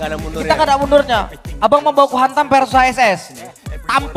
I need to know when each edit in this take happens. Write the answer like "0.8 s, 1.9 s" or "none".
none